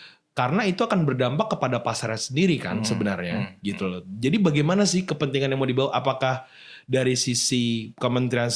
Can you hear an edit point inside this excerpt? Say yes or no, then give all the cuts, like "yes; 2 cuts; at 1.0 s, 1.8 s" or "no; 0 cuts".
no; 0 cuts